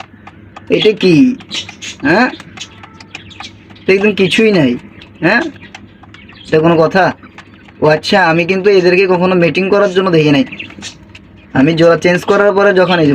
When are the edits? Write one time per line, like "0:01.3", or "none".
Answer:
none